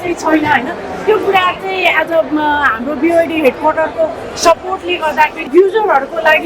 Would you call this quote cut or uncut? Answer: cut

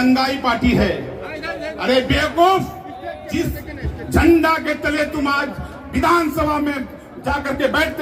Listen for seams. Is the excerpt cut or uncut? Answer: uncut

